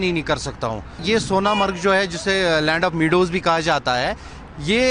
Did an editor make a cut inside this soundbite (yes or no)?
yes